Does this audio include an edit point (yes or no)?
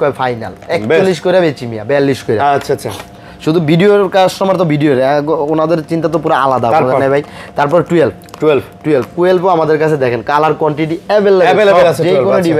no